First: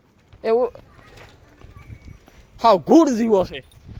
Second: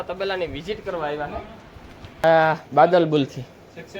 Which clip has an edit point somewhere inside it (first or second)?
second